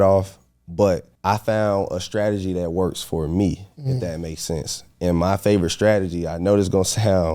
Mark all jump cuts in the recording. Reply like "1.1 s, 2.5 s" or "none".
1.1 s